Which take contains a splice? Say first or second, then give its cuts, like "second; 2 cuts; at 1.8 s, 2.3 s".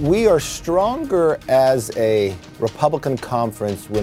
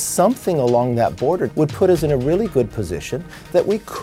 second; 1 cut; at 1.5 s